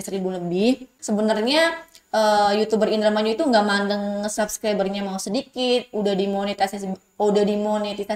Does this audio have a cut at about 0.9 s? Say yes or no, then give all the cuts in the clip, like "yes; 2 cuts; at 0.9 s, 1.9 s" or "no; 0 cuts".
yes; 1 cut; at 0.9 s